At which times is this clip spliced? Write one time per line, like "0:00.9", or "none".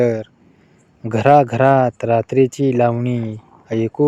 none